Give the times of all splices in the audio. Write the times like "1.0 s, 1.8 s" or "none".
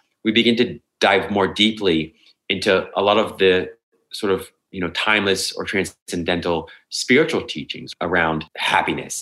8.3 s